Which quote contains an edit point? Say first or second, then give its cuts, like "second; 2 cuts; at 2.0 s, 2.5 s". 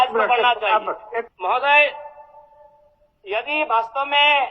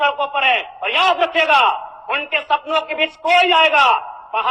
first; 1 cut; at 1.3 s